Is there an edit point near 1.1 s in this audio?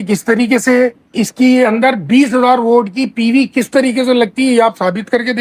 yes; 1 cut; at 1.1 s

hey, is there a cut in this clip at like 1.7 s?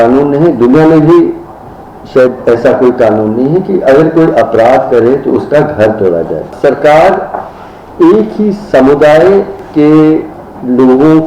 no; 2 cuts; at 6.5 s, 9.6 s

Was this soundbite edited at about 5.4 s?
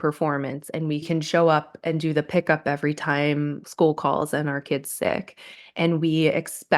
no; 1 cut; at 3.7 s

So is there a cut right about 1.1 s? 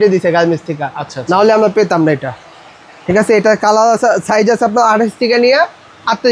no; 0 cuts

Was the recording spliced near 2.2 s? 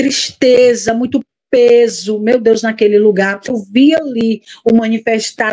no; 1 cut; at 3.6 s

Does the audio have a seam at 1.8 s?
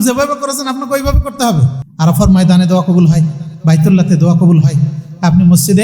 yes; 1 cut; at 1.8 s

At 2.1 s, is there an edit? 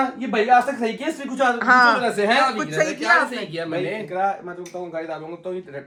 no; 0 cuts

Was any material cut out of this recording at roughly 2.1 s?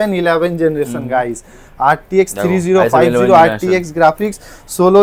no; 0 cuts

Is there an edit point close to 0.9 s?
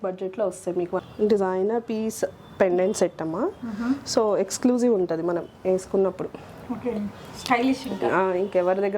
yes; 1 cut; at 0.9 s

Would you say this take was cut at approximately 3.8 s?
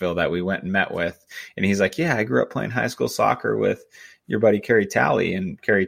no; 0 cuts

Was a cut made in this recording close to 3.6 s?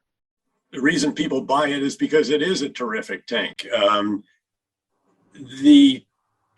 no; 0 cuts

